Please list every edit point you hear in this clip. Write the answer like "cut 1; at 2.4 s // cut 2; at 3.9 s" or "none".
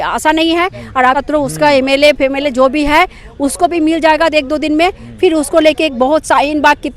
cut 1; at 1.2 s